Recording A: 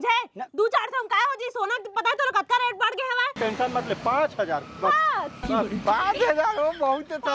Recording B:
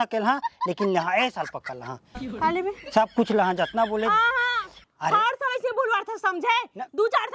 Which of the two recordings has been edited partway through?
A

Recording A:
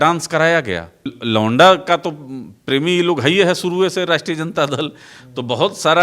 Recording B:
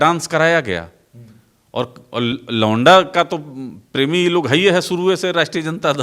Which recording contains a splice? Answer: A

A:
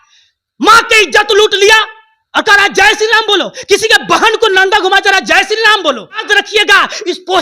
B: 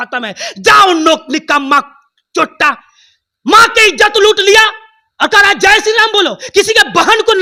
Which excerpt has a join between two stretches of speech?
A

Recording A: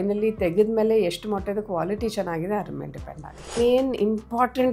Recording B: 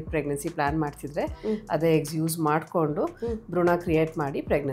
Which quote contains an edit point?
A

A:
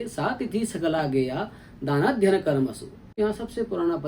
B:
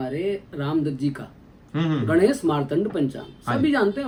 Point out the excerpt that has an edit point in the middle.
A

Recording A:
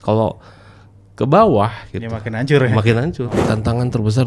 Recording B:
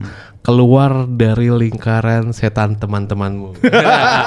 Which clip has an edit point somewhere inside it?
A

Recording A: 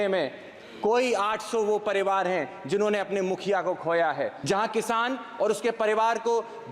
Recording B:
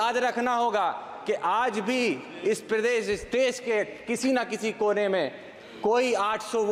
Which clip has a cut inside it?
A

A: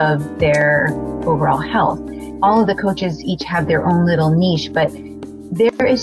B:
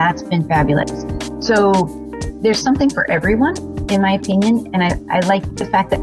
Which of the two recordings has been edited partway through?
A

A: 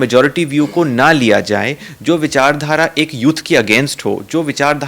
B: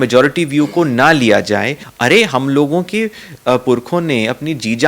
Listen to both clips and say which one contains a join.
B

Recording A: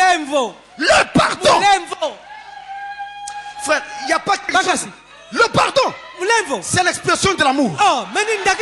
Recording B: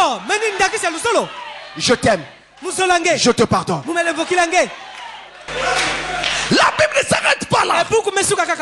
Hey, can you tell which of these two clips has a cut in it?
B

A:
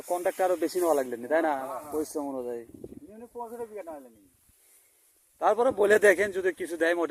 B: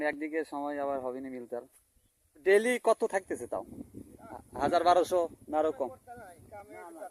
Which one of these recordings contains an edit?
B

